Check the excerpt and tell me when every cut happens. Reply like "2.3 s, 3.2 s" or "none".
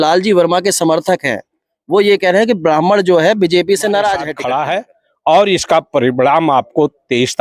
4.3 s